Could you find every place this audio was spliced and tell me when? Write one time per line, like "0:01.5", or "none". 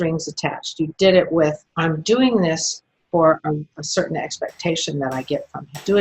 0:01.7